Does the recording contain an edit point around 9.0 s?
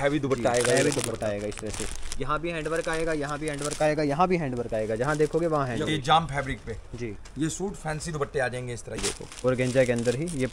yes; 2 cuts; at 5.9 s, 9.0 s

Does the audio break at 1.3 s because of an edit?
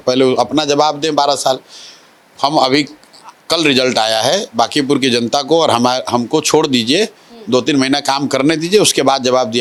no; 0 cuts

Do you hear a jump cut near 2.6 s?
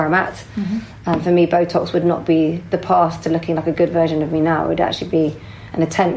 no; 0 cuts

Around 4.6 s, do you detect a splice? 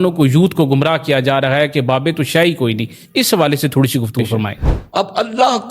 yes; 1 cut; at 4.6 s

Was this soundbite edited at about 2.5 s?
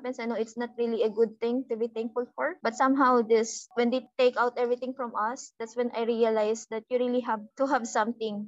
no; 1 cut; at 4.0 s

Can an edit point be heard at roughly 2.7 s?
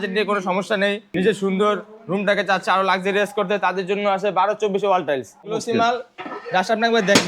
no; 2 cuts; at 1.1 s, 5.5 s

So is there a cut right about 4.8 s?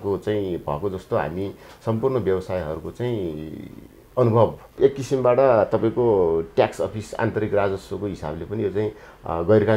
yes; 1 cut; at 4.8 s

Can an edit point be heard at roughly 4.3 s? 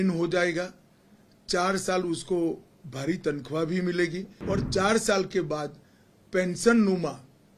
yes; 1 cut; at 4.3 s

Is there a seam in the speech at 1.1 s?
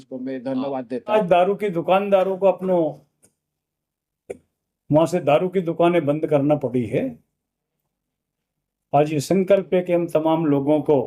yes; 1 cut; at 1.1 s

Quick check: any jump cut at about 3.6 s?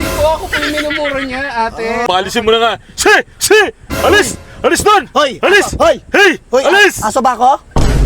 no; 1 cut; at 2.0 s

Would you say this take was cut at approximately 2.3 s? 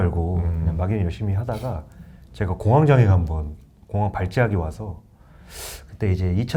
no; 0 cuts

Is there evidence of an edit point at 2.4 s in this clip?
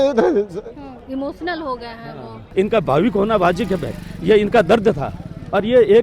yes; 2 cuts; at 1.0 s, 2.4 s

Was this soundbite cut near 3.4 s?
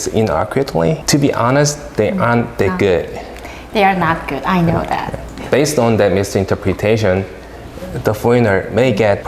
no; 2 cuts; at 1.0 s, 5.3 s

